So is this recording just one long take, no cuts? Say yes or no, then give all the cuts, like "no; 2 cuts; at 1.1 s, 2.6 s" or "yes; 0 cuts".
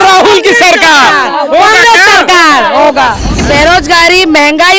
no; 1 cut; at 3.4 s